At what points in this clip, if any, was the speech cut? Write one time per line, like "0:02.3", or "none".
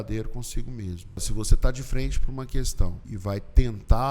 0:01.2
0:03.0